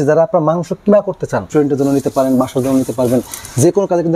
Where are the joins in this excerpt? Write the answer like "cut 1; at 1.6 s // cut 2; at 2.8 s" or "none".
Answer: cut 1; at 1.5 s